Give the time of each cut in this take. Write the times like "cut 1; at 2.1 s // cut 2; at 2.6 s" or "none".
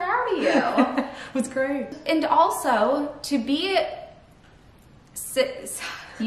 cut 1; at 2.0 s